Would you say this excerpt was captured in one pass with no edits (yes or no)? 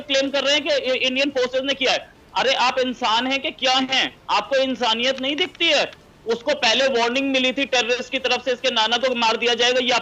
yes